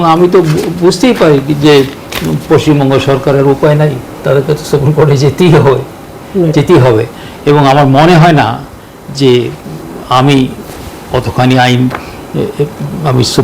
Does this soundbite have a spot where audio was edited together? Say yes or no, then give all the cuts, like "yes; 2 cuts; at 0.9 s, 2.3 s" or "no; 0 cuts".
no; 0 cuts